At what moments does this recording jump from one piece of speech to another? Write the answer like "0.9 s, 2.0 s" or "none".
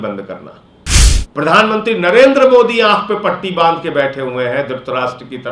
1.2 s